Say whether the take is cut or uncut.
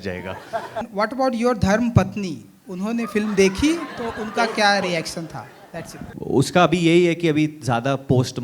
cut